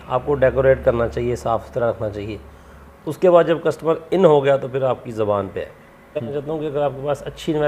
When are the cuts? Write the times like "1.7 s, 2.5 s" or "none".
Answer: 6.3 s